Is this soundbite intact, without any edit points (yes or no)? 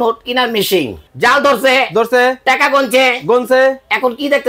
no